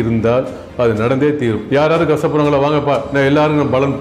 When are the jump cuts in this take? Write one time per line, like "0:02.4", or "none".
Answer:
0:01.6